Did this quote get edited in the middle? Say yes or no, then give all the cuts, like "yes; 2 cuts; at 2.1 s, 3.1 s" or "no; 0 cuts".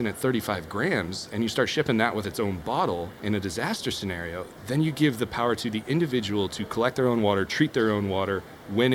no; 0 cuts